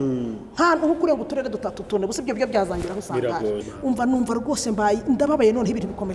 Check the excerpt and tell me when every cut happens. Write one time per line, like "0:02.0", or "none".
0:03.7